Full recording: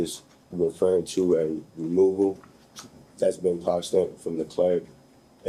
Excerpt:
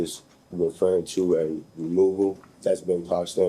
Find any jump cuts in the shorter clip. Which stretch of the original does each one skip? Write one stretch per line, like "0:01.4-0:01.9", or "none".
0:02.5-0:03.0